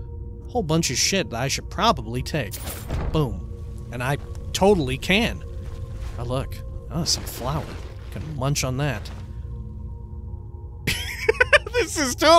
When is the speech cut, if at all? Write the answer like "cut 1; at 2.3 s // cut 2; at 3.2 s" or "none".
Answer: cut 1; at 10.9 s